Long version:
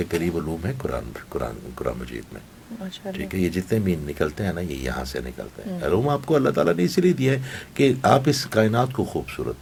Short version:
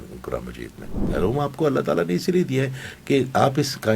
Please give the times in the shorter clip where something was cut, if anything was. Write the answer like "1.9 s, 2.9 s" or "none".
1.0 s